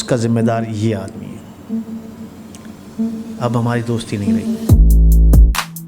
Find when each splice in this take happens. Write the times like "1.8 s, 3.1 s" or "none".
4.3 s